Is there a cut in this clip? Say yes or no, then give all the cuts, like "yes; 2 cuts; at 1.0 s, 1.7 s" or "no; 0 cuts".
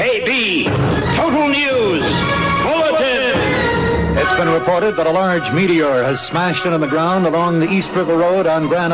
no; 0 cuts